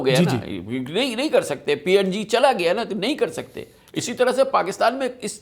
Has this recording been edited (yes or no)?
no